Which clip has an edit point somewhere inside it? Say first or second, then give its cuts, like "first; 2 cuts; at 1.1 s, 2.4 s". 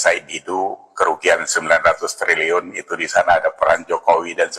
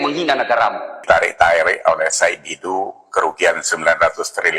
second; 1 cut; at 0.9 s